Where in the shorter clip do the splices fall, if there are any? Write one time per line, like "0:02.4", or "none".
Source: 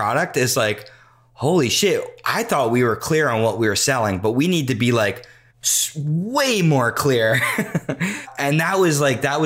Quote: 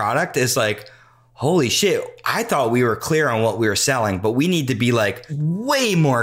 0:05.3